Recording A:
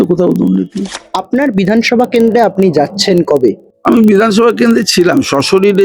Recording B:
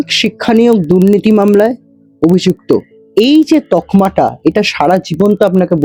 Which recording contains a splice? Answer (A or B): A